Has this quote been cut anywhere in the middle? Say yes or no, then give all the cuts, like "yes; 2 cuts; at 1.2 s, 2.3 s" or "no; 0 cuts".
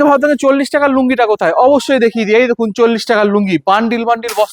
no; 0 cuts